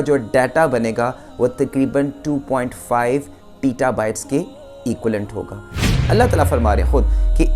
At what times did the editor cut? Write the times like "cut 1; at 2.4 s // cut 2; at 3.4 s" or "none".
cut 1; at 5.8 s